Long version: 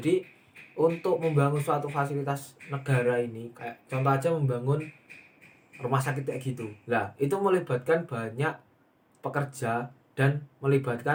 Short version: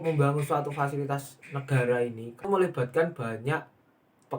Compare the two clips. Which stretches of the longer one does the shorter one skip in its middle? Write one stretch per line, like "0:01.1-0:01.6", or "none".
0:03.6-0:07.4